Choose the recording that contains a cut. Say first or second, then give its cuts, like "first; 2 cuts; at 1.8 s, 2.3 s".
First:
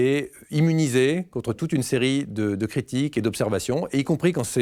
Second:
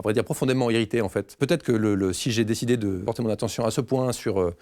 second; 2 cuts; at 1.4 s, 3.0 s